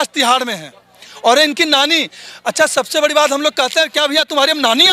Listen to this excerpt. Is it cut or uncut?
uncut